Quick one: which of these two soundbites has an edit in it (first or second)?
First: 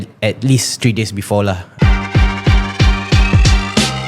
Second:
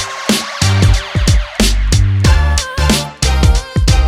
first